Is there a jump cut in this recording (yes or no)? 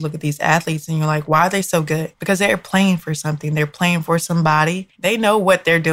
yes